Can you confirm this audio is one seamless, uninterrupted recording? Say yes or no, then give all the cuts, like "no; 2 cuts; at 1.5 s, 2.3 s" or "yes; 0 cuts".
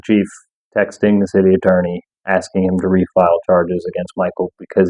yes; 0 cuts